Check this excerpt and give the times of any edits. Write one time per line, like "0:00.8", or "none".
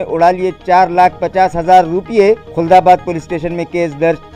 none